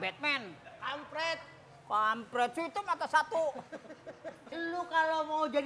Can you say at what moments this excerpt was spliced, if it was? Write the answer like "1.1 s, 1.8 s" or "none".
4.6 s